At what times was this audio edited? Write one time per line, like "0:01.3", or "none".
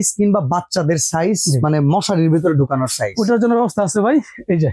none